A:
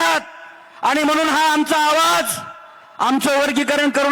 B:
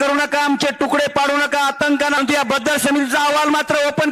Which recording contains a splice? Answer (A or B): B